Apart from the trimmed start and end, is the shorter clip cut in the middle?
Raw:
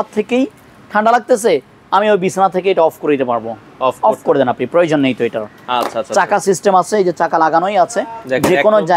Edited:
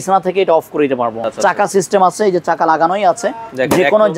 yes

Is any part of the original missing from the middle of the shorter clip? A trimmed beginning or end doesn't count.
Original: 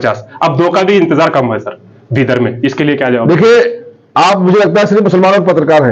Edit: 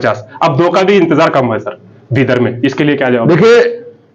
no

